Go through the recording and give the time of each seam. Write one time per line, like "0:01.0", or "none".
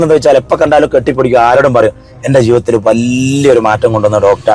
none